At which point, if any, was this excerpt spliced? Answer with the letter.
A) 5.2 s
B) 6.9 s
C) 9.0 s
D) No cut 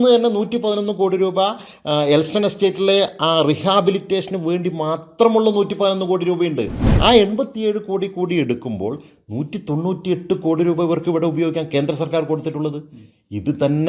B